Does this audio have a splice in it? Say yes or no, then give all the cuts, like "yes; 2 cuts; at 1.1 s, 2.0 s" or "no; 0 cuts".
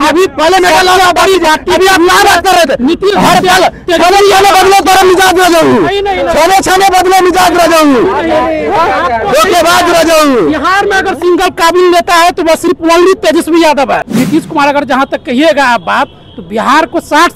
yes; 1 cut; at 14.0 s